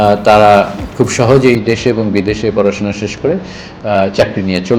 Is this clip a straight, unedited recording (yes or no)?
yes